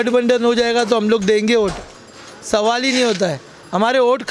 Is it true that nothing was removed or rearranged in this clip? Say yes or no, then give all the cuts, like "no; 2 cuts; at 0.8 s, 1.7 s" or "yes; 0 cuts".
yes; 0 cuts